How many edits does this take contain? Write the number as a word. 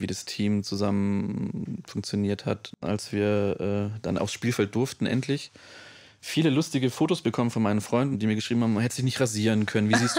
two